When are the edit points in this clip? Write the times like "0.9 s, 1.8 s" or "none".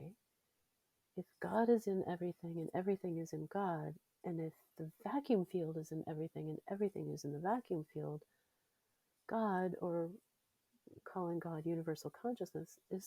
none